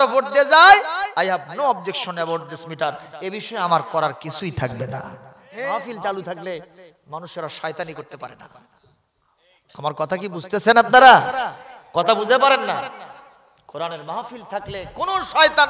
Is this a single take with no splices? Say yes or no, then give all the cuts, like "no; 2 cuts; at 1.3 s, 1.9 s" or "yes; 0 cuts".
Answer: no; 1 cut; at 5.8 s